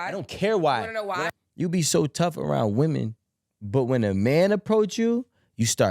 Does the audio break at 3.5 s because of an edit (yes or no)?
no